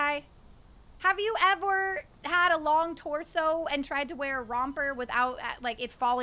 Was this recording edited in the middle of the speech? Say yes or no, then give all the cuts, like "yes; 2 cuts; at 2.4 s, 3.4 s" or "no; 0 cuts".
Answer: no; 0 cuts